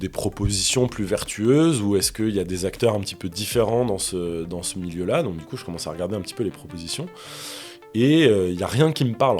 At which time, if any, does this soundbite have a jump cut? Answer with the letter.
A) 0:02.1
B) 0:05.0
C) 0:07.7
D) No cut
D